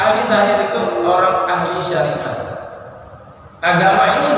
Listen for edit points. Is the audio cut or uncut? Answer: uncut